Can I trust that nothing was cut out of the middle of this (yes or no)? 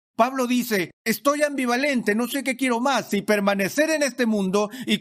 no